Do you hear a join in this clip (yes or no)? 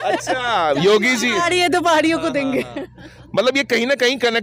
no